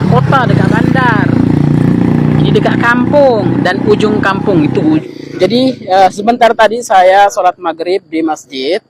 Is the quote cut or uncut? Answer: cut